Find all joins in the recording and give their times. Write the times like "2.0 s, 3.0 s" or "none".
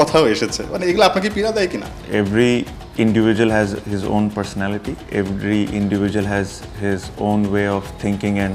none